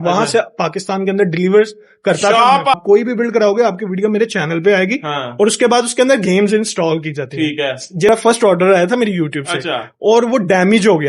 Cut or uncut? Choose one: cut